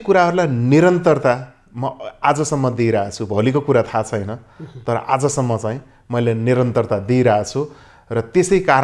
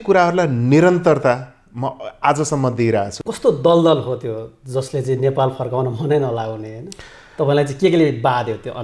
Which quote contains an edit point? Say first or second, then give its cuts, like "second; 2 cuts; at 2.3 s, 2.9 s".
second; 1 cut; at 3.2 s